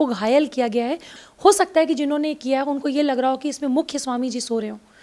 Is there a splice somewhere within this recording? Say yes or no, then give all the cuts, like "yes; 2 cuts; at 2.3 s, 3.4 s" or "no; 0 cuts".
yes; 1 cut; at 1.1 s